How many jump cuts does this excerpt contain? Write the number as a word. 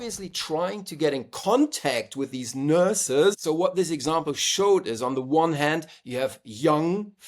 one